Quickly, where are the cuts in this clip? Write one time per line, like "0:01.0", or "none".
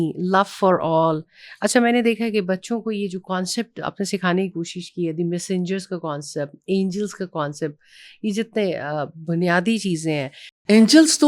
none